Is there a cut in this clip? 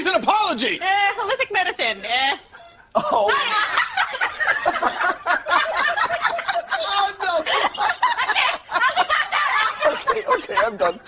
no; 0 cuts

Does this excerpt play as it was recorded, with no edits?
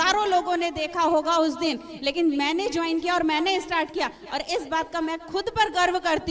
yes; 0 cuts

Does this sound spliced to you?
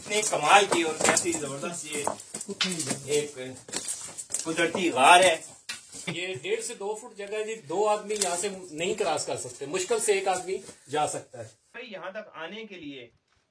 yes; 2 cuts; at 6.1 s, 11.8 s

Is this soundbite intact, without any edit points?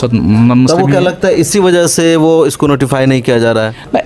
yes; 0 cuts

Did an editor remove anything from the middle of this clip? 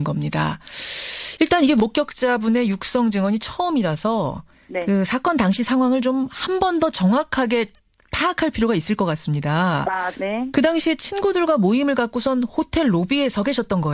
yes; 1 cut; at 5.1 s

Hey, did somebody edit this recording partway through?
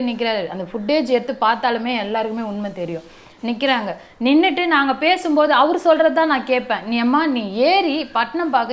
no; 0 cuts

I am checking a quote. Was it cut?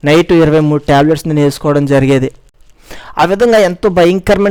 no; 0 cuts

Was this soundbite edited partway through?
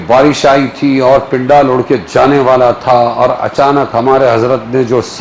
no; 0 cuts

